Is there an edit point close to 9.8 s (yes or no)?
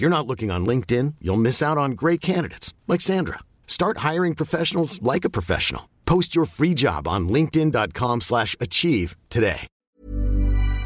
yes